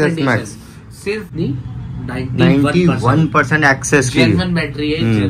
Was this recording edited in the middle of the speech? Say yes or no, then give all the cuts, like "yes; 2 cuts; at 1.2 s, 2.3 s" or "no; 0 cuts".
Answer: yes; 1 cut; at 1.3 s